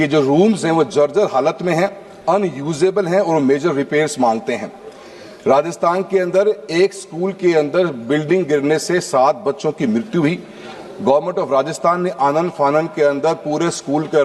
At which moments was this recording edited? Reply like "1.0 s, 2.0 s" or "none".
none